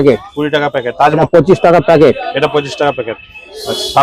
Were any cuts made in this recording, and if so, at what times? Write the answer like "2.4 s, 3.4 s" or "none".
1.2 s